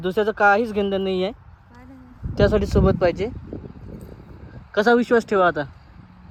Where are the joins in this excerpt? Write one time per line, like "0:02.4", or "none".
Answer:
none